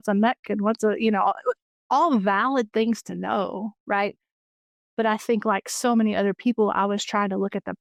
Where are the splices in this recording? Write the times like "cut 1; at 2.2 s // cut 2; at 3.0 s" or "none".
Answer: none